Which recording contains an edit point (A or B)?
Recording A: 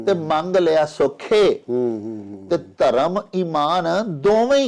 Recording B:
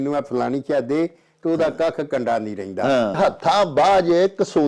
B